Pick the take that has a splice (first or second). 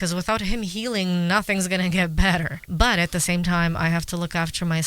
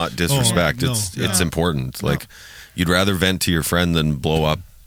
first